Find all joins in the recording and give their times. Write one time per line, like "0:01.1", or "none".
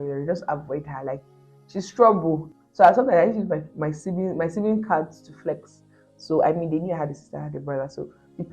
0:02.4